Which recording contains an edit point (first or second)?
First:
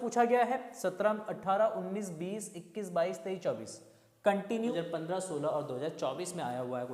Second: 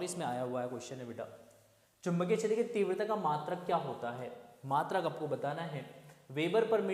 first